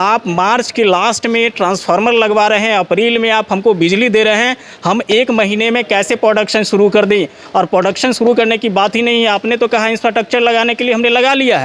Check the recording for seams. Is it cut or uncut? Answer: uncut